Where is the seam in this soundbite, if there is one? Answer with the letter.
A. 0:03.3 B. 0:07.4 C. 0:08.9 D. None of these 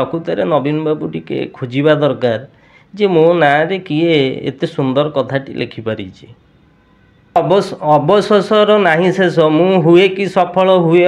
B